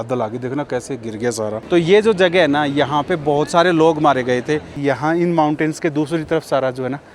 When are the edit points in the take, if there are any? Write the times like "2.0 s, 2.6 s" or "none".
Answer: 1.6 s, 4.8 s